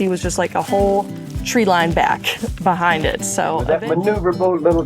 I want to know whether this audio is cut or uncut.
cut